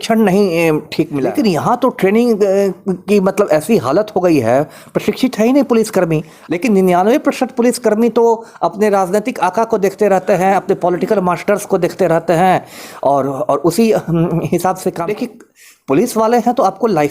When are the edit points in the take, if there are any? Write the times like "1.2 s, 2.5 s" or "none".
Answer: 1.2 s, 6.3 s, 15.0 s